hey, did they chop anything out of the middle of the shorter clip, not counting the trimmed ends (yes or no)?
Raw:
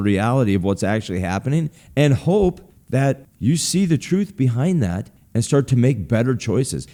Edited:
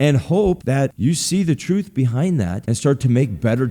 yes